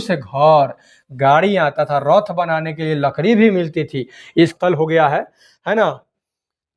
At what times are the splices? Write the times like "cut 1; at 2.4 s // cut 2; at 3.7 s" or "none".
cut 1; at 4.5 s